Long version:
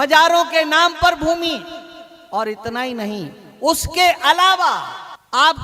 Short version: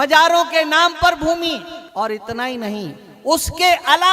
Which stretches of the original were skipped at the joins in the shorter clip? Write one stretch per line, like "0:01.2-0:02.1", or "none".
0:01.8-0:02.1

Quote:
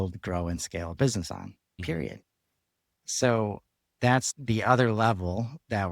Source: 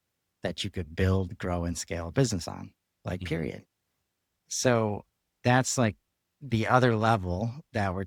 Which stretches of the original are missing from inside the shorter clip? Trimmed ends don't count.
0:03.0-0:03.2
0:05.7-0:06.3

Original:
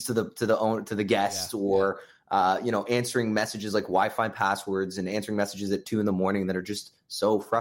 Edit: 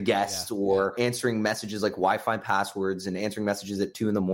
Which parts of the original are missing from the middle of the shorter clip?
0:02.0-0:02.8

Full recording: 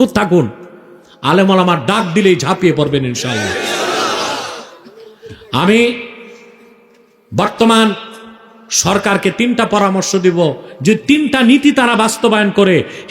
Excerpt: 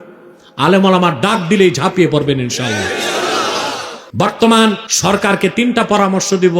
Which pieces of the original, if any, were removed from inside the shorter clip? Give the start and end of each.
0:04.6-0:07.1
0:08.1-0:08.7

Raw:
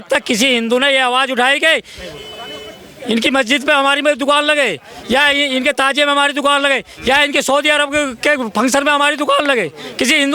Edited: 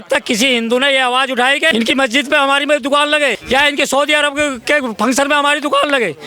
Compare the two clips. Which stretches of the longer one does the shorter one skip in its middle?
0:01.7-0:03.1
0:04.8-0:07.0

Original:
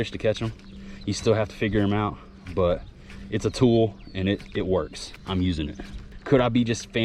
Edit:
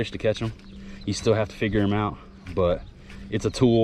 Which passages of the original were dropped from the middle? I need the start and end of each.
none

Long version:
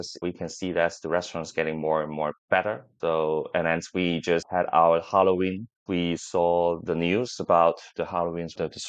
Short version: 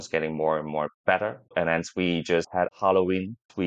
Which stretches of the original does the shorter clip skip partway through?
0:02.9-0:03.5
0:04.7-0:05.0

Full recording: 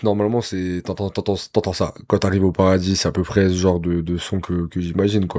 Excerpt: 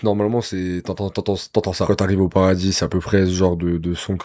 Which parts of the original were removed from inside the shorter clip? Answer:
0:01.9-0:02.1

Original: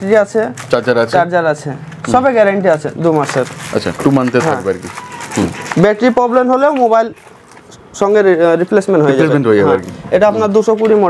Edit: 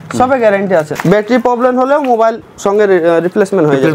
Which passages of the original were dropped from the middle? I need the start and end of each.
0:02.9-0:05.7
0:07.2-0:07.8

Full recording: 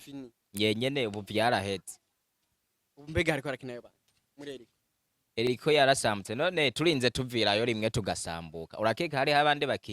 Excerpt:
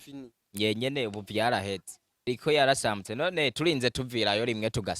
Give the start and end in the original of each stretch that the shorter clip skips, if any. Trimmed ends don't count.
0:02.3-0:05.5

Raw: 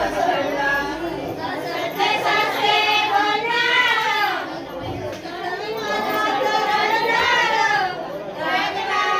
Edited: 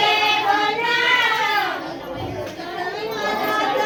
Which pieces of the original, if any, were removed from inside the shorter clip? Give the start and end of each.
none

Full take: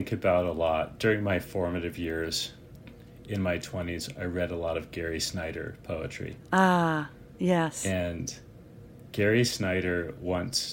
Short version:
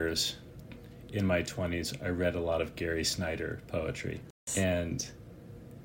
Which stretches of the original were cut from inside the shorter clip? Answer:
0:06.5-0:07.6

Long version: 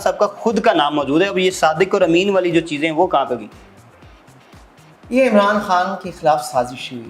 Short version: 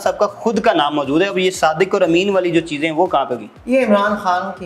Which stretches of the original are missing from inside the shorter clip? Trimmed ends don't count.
0:03.5-0:04.9

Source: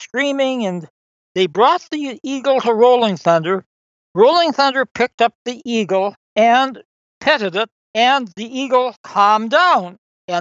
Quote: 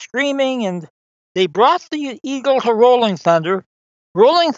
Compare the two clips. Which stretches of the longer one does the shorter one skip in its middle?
none

